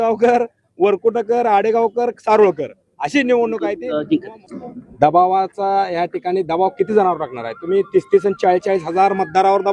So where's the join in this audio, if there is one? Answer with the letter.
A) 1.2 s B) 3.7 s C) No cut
B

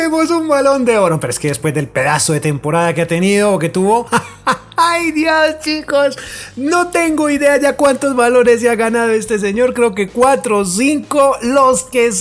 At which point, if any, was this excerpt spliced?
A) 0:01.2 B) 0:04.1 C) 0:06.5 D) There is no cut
B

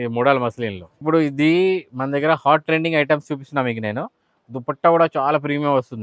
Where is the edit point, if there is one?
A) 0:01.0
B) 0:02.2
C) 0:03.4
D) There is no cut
A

